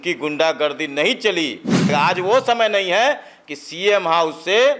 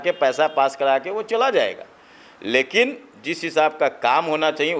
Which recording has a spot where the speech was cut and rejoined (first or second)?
first